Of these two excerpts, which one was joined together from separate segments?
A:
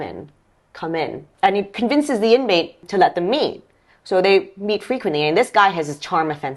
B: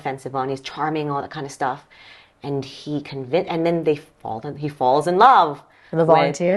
A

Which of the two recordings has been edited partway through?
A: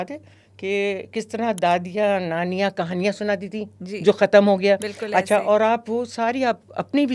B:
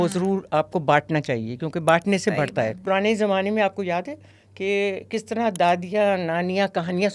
B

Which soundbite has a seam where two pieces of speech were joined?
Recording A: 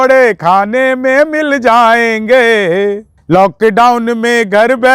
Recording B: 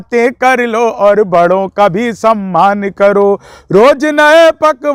A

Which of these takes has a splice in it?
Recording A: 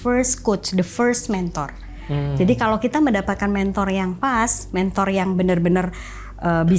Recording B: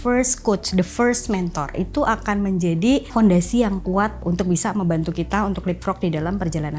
B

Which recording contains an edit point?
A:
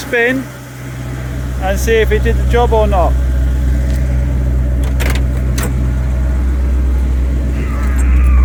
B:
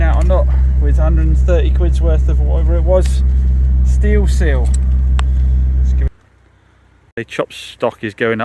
B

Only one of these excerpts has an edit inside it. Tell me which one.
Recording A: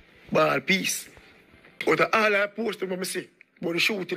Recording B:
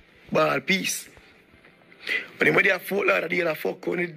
A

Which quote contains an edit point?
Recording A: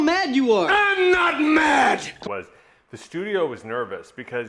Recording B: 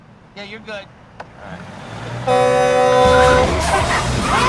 A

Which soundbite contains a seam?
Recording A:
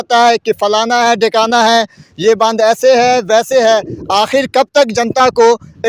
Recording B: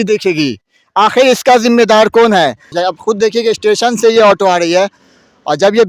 B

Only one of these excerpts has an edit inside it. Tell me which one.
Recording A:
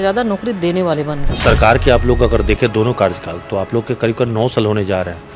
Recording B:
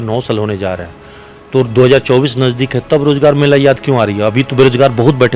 A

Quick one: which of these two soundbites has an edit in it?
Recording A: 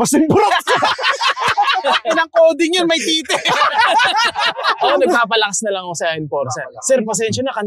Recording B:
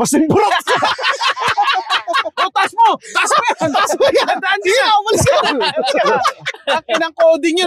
A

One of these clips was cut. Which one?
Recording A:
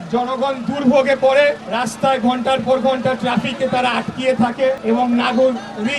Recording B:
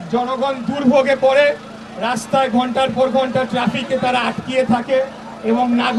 A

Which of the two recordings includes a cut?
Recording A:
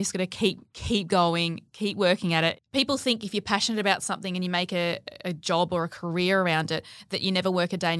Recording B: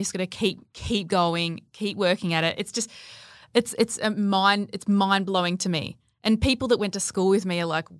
A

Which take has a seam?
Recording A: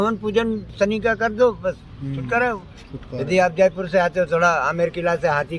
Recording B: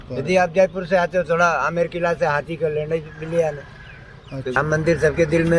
B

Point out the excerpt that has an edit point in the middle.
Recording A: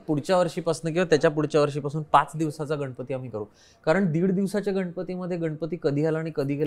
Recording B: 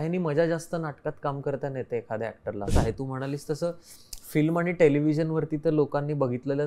B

